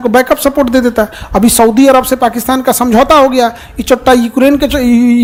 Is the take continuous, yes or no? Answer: yes